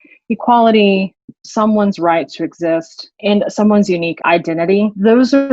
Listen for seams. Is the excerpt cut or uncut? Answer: cut